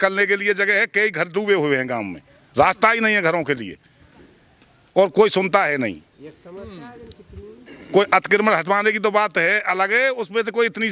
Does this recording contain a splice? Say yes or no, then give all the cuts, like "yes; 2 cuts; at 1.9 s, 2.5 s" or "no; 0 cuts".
no; 0 cuts